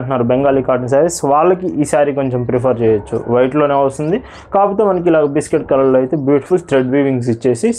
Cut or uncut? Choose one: uncut